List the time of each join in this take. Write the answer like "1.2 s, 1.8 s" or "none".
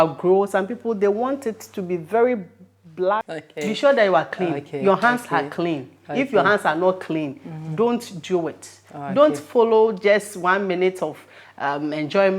3.3 s